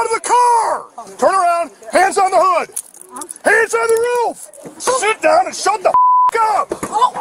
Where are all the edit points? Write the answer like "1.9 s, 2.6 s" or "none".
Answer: 1.0 s, 4.8 s